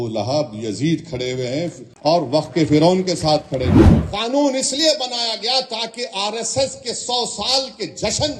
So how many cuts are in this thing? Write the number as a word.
two